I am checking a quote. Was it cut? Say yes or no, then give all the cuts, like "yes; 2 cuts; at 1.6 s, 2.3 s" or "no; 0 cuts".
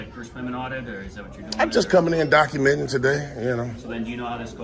no; 0 cuts